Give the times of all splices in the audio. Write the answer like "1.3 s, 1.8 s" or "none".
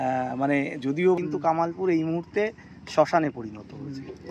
1.2 s